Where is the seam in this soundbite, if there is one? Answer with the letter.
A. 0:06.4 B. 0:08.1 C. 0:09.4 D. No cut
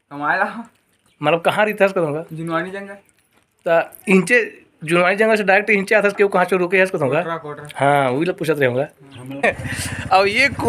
C